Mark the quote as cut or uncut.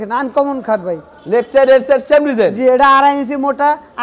uncut